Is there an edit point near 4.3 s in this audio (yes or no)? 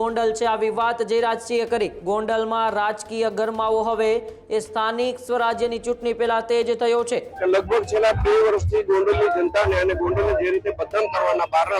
no